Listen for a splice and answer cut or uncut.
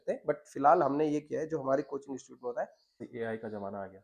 cut